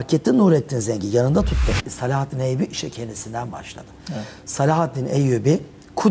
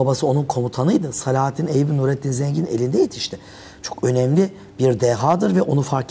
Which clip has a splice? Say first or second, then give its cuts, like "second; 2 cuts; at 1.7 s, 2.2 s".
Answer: first; 1 cut; at 1.9 s